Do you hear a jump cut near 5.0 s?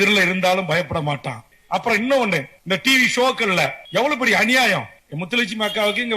no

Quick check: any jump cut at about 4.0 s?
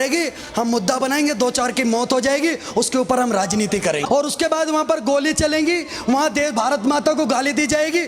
yes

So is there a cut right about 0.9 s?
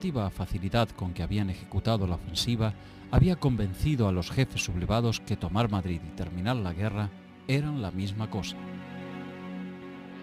yes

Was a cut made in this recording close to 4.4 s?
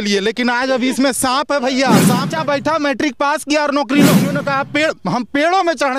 yes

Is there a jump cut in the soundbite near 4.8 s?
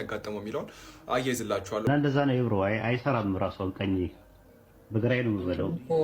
no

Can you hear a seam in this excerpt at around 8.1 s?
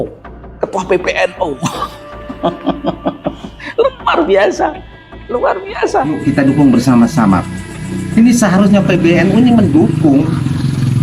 no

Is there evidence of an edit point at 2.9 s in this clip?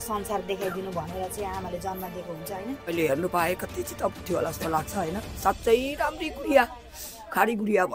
yes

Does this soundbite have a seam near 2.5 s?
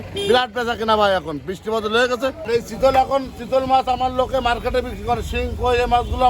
yes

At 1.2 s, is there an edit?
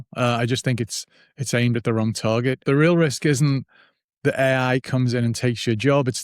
no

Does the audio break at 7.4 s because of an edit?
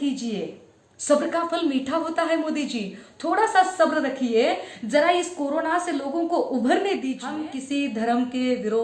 yes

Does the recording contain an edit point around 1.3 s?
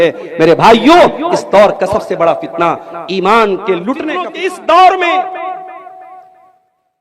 no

